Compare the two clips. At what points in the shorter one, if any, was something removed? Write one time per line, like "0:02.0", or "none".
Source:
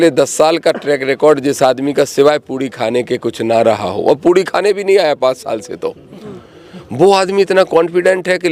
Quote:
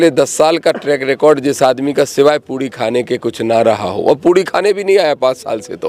none